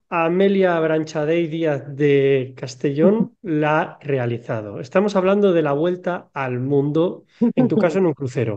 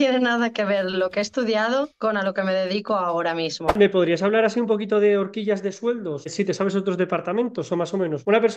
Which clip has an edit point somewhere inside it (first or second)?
second